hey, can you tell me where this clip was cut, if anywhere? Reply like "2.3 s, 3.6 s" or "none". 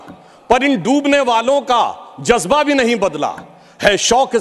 none